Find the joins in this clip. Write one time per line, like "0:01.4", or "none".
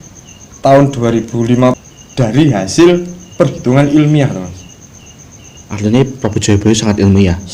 0:01.8

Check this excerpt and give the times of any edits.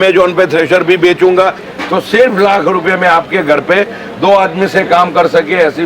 0:01.7

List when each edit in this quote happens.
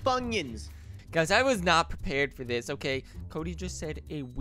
0:01.0

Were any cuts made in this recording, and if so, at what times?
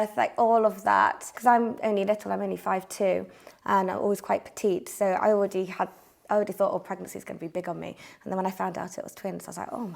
0:01.3

